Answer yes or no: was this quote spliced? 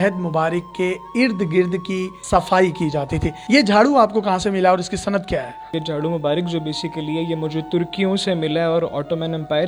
no